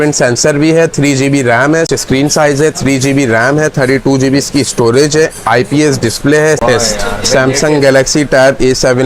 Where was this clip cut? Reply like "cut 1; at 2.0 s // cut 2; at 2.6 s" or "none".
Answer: cut 1; at 1.9 s // cut 2; at 6.6 s